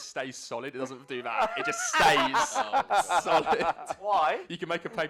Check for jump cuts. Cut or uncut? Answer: uncut